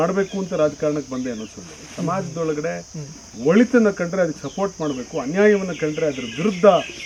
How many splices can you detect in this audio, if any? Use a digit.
0